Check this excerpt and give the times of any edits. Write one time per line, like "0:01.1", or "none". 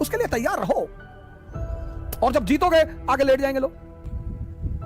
0:03.9